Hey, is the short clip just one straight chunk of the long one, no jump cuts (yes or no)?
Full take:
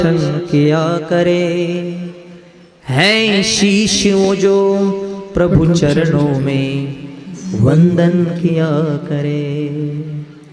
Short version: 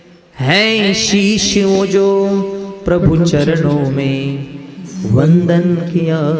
yes